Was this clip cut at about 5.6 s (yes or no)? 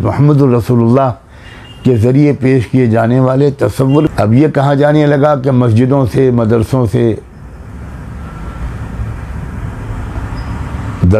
no